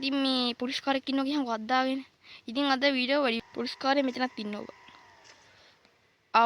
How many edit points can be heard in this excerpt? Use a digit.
1